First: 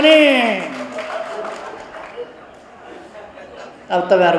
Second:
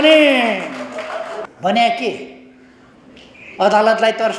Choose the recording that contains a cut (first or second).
second